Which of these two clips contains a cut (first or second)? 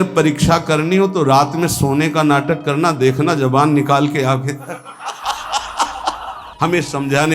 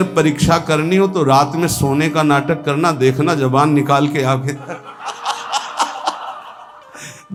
first